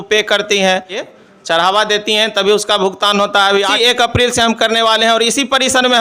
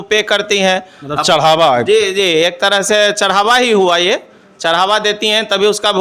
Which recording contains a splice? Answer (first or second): first